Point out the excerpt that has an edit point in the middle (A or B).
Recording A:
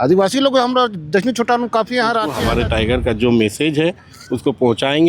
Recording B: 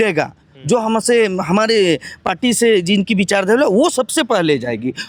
A